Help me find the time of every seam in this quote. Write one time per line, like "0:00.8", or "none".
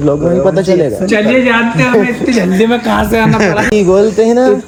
none